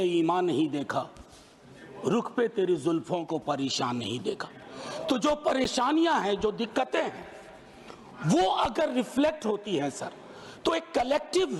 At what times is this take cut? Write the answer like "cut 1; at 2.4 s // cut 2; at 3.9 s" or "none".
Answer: none